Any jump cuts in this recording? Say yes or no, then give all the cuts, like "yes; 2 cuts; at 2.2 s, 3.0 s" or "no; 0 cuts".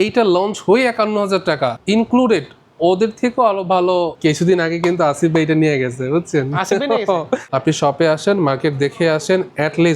yes; 3 cuts; at 1.8 s, 4.1 s, 7.5 s